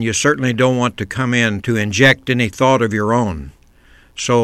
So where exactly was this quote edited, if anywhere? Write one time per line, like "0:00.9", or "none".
0:01.6